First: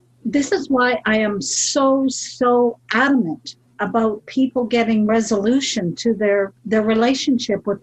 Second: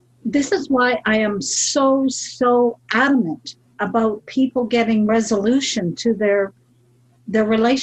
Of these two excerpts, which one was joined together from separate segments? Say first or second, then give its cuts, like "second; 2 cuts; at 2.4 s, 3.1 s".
first; 1 cut; at 6.6 s